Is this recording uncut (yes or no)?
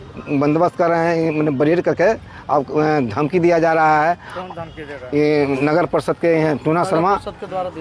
yes